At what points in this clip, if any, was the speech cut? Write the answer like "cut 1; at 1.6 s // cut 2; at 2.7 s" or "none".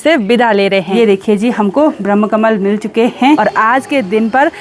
cut 1; at 1.0 s // cut 2; at 3.4 s

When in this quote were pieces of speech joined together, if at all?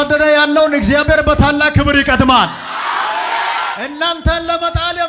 cut 1; at 3.8 s

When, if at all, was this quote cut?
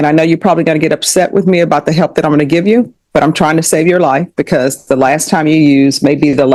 none

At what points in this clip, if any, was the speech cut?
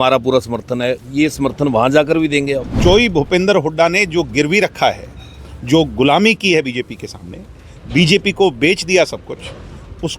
cut 1; at 2.7 s

